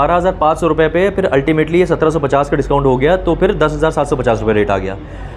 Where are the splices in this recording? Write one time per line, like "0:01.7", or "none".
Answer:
none